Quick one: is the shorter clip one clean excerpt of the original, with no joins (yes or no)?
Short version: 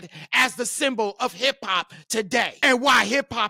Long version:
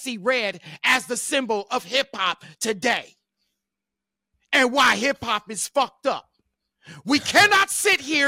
no